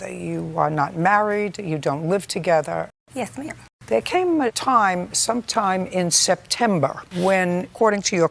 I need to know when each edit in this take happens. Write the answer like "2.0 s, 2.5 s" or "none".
none